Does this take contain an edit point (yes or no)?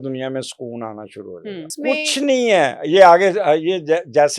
yes